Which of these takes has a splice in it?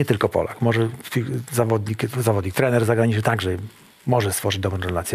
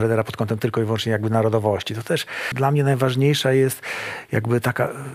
second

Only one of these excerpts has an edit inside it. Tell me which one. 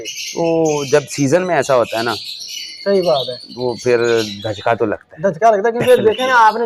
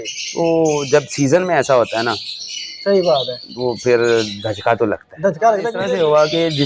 second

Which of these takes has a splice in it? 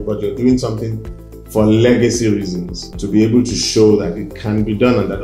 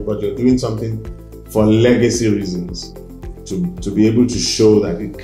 first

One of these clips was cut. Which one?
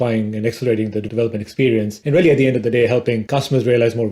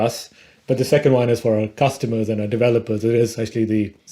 first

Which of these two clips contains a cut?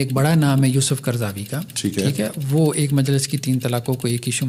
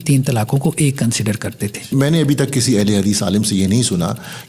second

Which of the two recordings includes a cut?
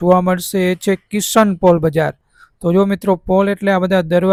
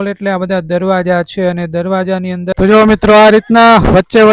second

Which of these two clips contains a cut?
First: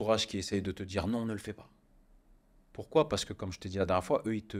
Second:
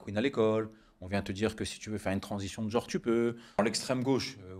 second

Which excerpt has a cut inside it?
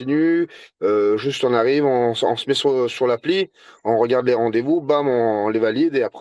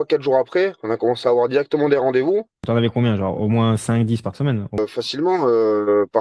second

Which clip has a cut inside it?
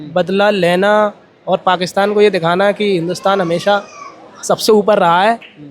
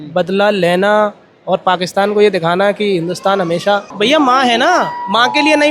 second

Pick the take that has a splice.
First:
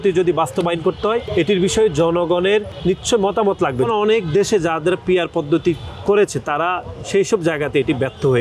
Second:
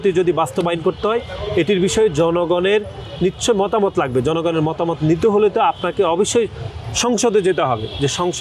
first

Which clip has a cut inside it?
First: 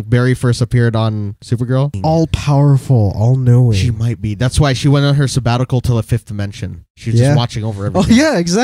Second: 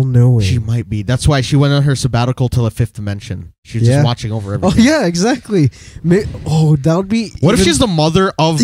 first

